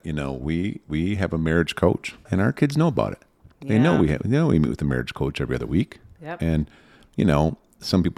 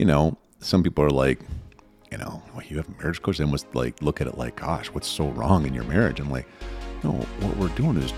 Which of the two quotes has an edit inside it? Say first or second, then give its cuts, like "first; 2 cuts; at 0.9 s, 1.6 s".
first; 1 cut; at 2.3 s